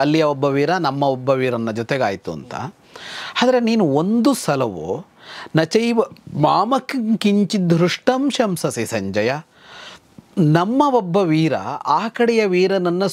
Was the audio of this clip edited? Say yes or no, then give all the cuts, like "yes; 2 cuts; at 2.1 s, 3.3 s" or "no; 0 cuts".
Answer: no; 0 cuts